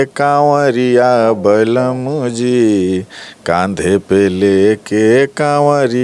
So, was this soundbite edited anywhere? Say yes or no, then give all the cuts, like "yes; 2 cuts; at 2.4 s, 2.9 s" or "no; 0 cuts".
no; 0 cuts